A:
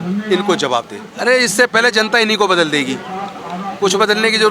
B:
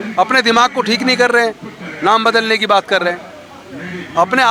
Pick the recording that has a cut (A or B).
A